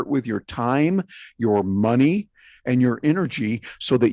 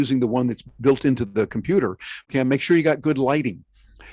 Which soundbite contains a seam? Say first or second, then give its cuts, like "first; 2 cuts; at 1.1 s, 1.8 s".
second; 1 cut; at 2.3 s